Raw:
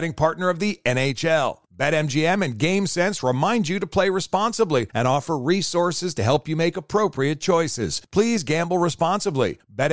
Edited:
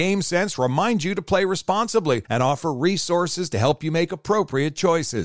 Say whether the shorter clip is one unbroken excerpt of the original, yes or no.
yes